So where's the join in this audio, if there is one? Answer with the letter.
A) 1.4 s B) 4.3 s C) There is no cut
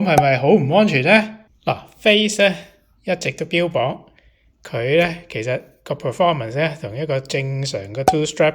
A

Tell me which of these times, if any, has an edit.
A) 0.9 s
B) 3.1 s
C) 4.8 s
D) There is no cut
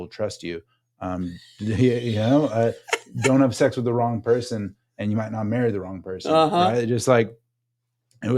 D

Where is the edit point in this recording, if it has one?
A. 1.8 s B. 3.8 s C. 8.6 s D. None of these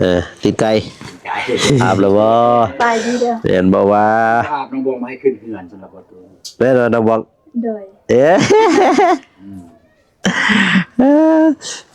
A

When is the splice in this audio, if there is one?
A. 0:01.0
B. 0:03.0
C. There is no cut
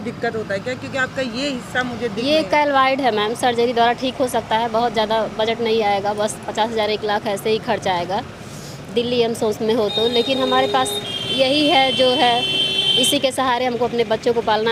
C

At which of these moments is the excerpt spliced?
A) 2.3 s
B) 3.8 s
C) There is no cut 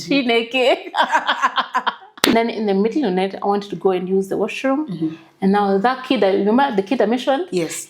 A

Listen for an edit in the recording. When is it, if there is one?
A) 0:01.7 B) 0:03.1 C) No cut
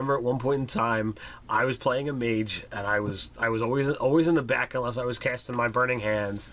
C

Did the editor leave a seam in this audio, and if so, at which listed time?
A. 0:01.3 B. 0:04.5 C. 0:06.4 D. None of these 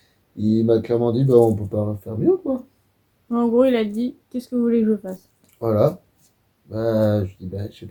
D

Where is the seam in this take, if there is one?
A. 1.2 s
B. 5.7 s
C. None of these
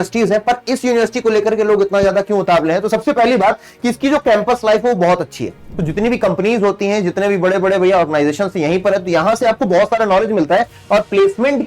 B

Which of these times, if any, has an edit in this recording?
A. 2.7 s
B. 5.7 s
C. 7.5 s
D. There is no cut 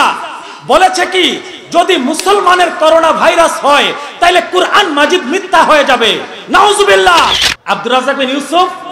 C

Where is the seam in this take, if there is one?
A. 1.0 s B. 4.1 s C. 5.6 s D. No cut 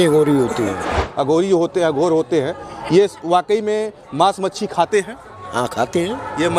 A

